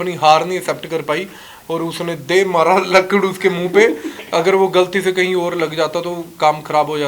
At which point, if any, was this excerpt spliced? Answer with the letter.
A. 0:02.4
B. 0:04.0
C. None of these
C